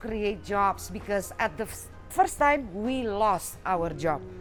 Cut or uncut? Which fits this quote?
uncut